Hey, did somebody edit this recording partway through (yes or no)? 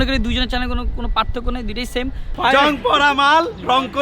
yes